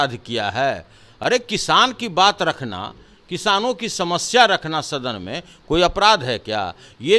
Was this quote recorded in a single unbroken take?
yes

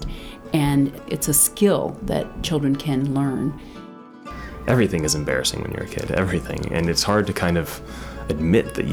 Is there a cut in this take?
yes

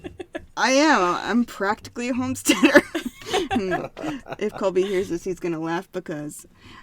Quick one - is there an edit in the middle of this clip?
no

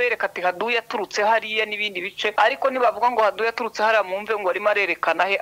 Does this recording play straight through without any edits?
no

